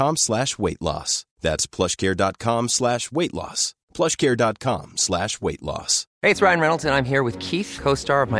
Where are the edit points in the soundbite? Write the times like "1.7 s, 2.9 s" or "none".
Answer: 6.0 s